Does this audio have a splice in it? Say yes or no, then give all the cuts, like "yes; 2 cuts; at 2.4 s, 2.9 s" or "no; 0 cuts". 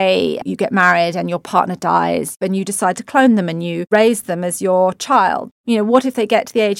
yes; 1 cut; at 5.5 s